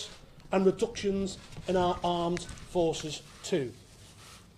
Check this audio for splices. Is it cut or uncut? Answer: cut